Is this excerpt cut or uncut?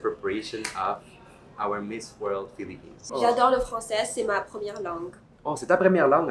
cut